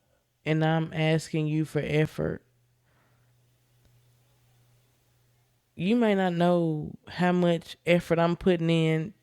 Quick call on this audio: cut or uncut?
uncut